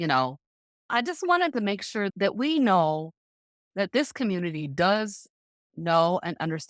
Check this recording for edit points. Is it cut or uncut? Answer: cut